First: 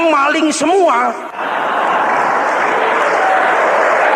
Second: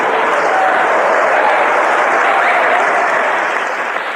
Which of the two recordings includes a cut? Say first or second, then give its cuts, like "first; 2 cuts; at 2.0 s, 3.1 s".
first; 1 cut; at 1.3 s